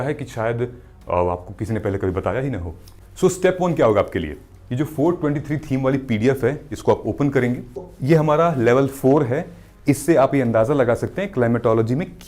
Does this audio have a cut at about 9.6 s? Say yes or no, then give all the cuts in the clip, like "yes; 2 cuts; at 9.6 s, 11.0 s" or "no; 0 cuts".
no; 2 cuts; at 3.2 s, 7.9 s